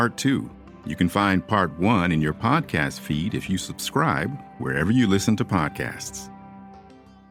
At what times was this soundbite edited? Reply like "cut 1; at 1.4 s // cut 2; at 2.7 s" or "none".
none